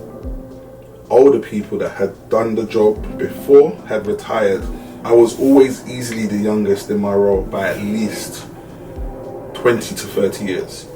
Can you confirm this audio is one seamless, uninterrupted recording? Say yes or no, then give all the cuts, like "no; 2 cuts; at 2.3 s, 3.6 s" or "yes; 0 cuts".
no; 1 cut; at 4.9 s